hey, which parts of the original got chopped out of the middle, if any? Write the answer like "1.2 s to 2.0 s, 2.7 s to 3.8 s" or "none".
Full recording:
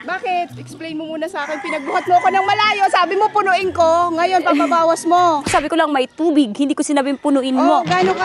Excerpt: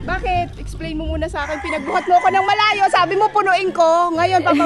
none